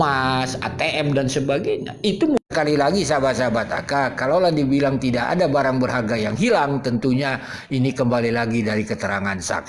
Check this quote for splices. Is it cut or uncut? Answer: cut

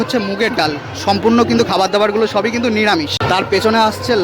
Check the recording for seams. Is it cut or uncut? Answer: cut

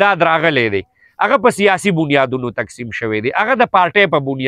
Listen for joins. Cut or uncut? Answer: uncut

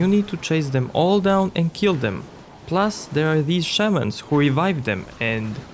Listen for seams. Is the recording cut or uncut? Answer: cut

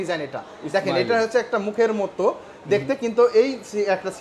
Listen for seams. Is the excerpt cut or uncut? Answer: uncut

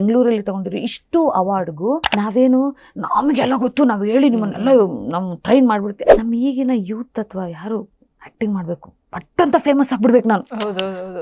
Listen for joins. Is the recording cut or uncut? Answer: cut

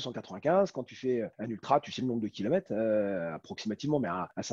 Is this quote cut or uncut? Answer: uncut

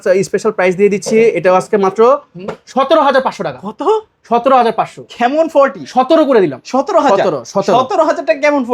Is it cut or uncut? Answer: uncut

